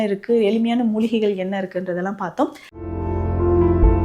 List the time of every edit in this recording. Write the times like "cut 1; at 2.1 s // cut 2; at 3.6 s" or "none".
cut 1; at 2.7 s